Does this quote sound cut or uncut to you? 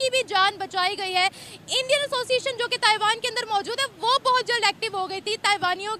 uncut